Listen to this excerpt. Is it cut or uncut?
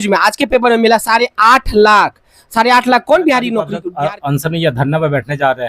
cut